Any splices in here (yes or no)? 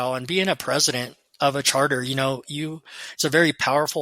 no